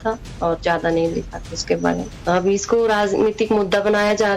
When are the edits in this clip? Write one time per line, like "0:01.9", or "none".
0:02.1